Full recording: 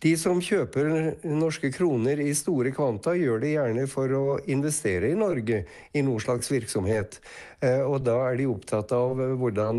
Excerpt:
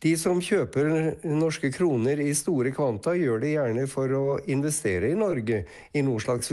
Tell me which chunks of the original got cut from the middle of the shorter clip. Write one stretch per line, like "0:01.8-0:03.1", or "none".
none